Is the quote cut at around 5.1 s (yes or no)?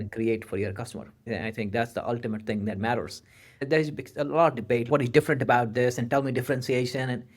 no